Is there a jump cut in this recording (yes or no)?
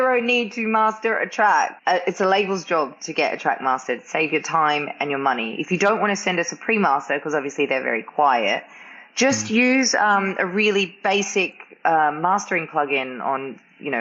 yes